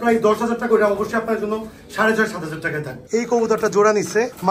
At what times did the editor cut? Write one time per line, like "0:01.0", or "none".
0:03.0

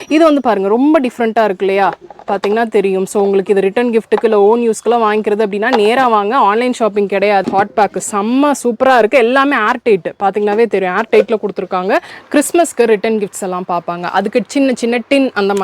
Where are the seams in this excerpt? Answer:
0:07.4
0:12.2

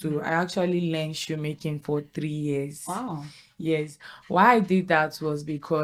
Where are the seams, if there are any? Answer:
none

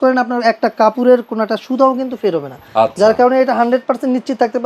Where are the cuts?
none

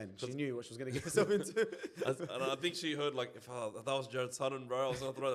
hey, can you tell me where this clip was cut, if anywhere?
none

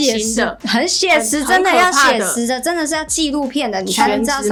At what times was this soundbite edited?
none

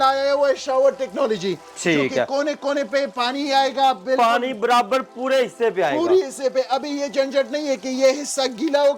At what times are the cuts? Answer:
none

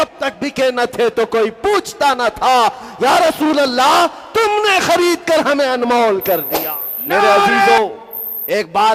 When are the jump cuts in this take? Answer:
0:07.8

